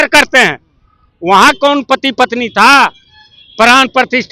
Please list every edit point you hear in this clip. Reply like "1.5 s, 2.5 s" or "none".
none